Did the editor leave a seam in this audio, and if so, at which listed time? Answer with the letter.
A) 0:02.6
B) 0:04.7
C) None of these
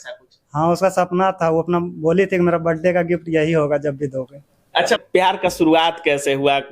B